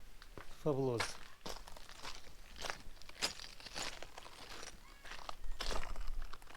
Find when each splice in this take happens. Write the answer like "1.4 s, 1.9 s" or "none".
1.3 s

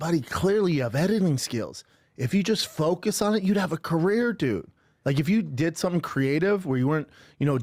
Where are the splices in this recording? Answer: none

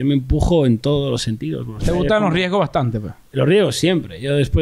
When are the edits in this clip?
1.7 s

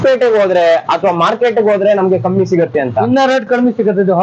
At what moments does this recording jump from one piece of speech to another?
none

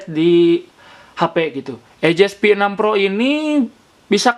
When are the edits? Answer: 1.9 s

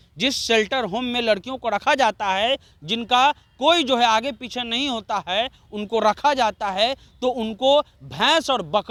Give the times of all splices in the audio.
none

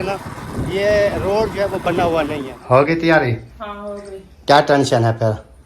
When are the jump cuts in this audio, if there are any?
2.5 s

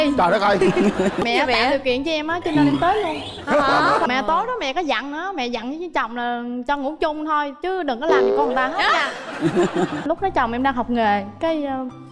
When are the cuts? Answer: 1.2 s, 4.1 s, 10.1 s

